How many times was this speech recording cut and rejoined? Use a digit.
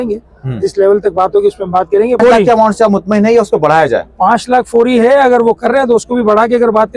1